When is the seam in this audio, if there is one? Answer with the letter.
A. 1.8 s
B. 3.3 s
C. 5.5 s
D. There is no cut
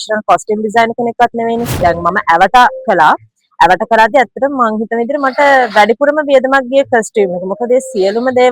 A